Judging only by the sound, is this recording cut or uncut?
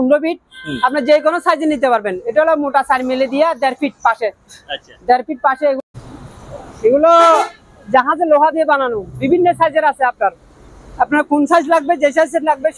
cut